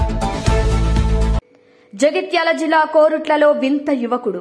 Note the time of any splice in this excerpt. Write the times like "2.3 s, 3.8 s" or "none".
1.5 s